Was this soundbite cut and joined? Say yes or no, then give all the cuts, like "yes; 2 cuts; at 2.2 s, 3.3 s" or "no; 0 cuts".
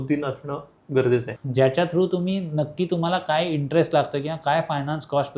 yes; 1 cut; at 1.3 s